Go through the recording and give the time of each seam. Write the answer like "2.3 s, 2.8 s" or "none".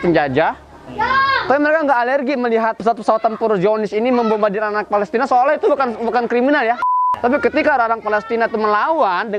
2.8 s, 6.9 s